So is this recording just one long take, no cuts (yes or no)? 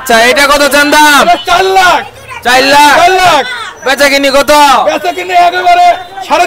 yes